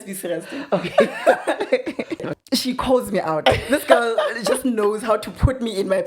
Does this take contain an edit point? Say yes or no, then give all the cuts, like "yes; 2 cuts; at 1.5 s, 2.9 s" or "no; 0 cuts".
yes; 1 cut; at 2.3 s